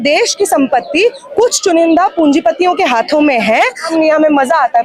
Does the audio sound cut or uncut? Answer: cut